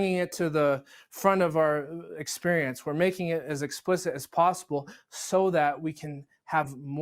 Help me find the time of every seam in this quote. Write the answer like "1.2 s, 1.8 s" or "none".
none

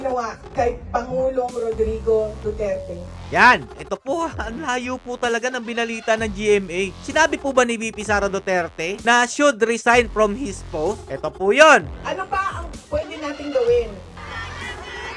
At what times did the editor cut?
3.7 s, 11.9 s

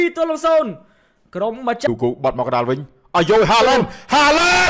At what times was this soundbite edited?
1.9 s

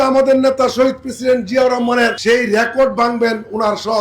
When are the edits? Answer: 2.2 s

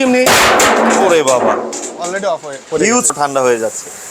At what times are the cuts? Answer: 3.1 s

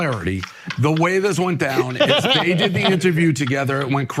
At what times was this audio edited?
none

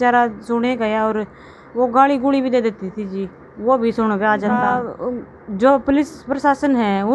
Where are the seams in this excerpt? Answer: 4.9 s

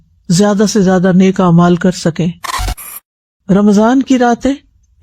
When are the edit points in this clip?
2.8 s

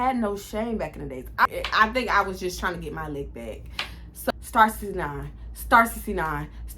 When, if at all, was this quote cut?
1.5 s, 4.3 s

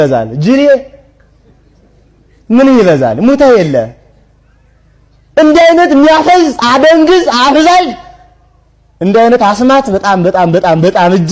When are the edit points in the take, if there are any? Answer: none

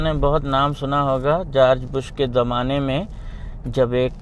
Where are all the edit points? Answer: none

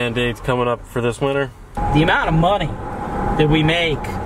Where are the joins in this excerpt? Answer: 1.6 s

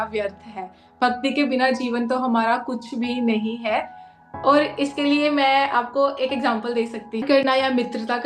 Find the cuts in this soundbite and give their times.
7.2 s

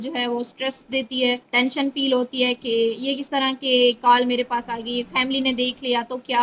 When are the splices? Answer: 1.4 s

